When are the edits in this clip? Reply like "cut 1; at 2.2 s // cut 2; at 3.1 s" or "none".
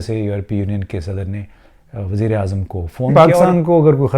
cut 1; at 3.1 s